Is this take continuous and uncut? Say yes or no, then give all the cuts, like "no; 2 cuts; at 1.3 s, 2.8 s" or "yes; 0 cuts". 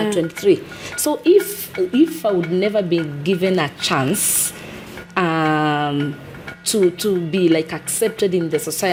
yes; 0 cuts